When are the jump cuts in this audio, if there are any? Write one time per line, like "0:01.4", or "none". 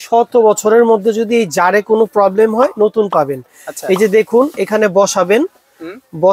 none